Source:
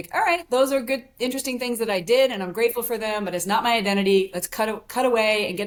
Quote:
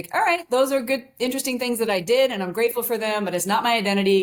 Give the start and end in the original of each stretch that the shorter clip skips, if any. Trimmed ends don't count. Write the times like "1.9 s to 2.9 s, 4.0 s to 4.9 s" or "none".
none